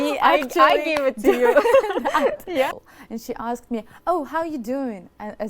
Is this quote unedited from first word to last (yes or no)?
no